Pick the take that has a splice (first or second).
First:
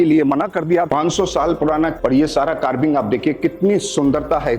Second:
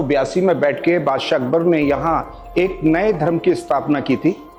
first